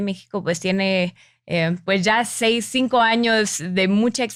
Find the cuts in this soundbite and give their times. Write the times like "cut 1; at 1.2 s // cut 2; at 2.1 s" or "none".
none